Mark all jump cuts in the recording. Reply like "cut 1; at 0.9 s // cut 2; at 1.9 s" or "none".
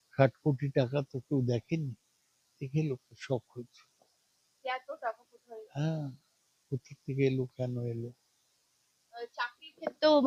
none